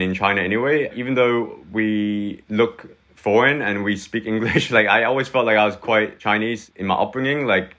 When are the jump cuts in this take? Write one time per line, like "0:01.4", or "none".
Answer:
none